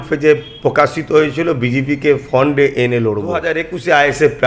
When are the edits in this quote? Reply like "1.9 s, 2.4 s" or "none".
3.5 s